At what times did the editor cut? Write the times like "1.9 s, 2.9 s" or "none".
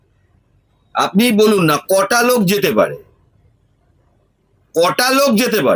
none